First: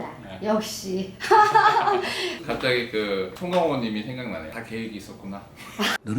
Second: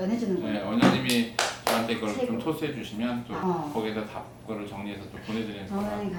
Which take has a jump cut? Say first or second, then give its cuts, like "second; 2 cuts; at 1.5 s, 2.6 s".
first; 1 cut; at 2.4 s